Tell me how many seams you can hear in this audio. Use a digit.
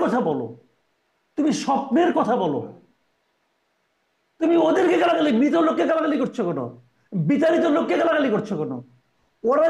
0